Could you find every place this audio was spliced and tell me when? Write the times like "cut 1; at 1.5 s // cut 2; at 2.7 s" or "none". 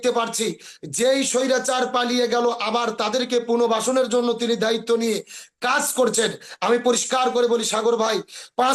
none